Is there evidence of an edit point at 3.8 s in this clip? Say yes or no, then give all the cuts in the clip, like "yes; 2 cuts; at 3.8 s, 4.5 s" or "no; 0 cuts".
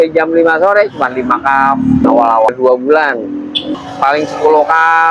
yes; 2 cuts; at 2.5 s, 3.8 s